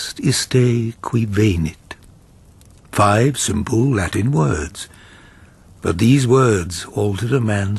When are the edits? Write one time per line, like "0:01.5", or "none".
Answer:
0:05.7